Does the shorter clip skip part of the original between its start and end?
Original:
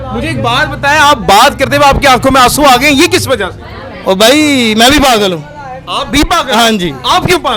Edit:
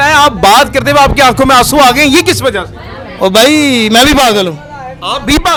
no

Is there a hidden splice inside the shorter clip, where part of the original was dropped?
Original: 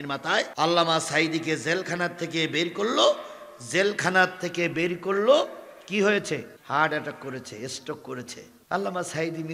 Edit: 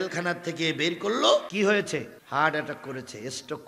yes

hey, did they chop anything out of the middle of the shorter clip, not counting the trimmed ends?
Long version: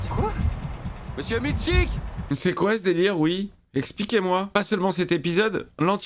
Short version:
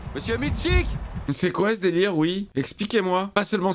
yes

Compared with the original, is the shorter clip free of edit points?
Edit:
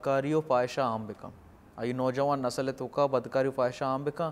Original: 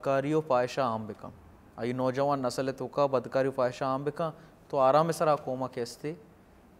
yes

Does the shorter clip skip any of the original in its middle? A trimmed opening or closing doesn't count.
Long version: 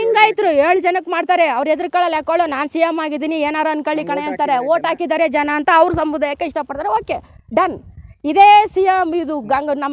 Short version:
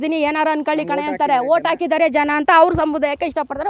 no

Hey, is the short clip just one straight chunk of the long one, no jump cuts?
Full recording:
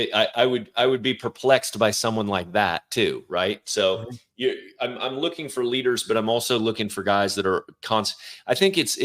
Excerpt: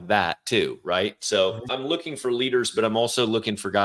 no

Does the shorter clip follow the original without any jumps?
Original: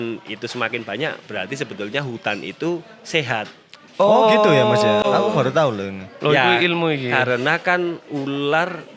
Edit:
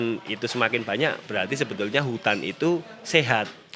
yes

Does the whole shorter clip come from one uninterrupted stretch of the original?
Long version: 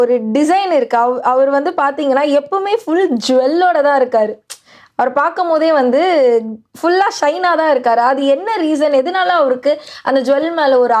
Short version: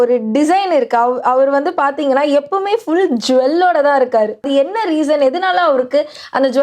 no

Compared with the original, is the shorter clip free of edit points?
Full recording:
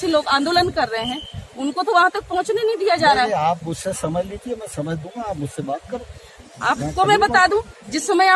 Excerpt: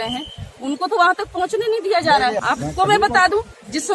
no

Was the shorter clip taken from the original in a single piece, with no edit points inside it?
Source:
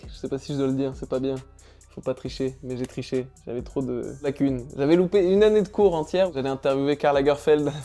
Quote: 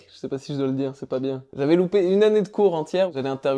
no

